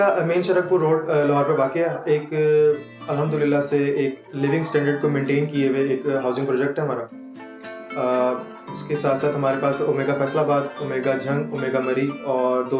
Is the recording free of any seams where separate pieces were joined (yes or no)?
yes